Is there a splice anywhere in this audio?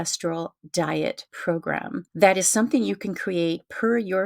yes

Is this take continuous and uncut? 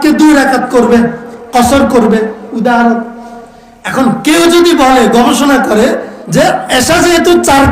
no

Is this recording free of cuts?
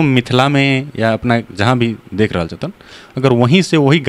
yes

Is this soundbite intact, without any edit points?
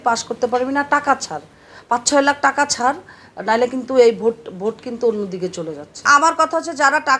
yes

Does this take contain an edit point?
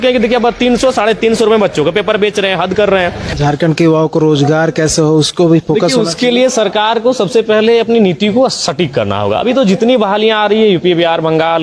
yes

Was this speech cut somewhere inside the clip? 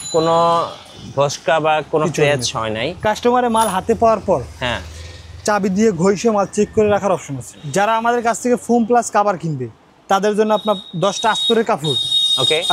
yes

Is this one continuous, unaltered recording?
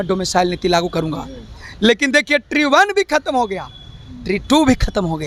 yes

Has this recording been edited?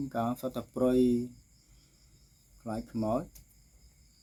no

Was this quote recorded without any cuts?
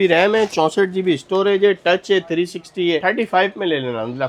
yes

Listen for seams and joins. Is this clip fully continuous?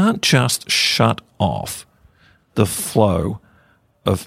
yes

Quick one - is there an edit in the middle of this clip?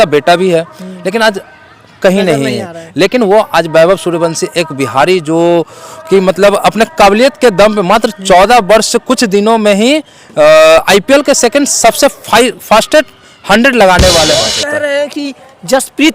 yes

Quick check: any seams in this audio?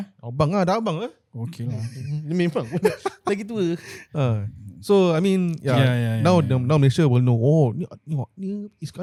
no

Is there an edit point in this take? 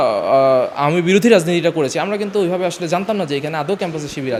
no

